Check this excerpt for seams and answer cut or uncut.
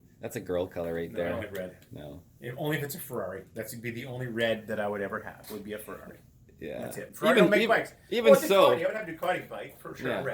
uncut